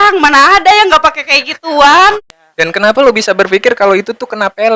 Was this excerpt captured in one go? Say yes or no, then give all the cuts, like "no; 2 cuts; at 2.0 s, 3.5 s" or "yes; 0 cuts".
no; 1 cut; at 2.3 s